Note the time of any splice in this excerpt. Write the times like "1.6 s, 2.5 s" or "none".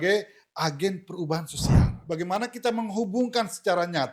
1.9 s